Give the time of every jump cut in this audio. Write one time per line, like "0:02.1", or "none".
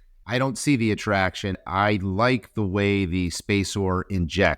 0:01.6